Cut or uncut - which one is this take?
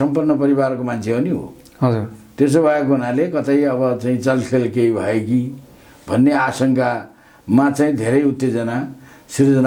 uncut